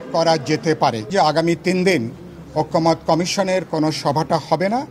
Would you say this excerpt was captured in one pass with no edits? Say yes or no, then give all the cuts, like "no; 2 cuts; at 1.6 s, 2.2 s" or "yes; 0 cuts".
no; 1 cut; at 1.1 s